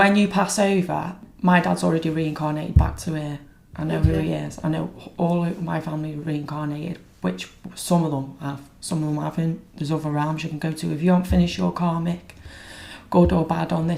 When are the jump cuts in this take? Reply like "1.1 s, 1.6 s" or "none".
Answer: 1.3 s